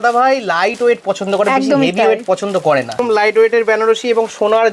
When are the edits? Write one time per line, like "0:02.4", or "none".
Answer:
0:03.0